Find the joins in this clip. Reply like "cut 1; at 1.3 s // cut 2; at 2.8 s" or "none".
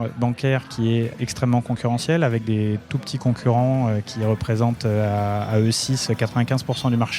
cut 1; at 1.1 s